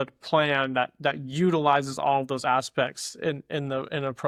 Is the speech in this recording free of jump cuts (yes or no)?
yes